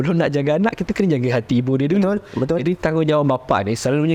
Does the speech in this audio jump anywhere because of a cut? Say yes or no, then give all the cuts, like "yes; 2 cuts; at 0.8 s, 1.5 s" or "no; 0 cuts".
no; 0 cuts